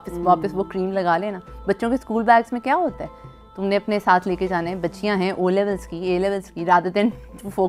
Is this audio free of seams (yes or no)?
yes